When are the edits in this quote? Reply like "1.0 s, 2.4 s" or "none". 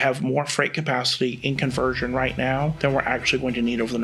2.7 s